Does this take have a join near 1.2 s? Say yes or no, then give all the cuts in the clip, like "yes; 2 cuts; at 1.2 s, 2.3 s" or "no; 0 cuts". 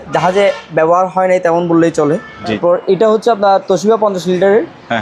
no; 1 cut; at 2.6 s